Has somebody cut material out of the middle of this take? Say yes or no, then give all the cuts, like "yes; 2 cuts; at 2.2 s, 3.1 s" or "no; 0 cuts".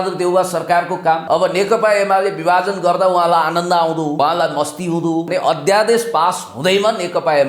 yes; 3 cuts; at 1.2 s, 4.2 s, 5.3 s